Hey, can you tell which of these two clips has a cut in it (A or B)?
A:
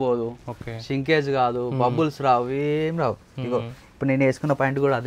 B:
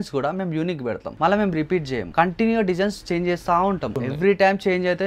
B